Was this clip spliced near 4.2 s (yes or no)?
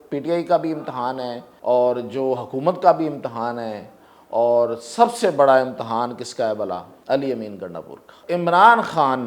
no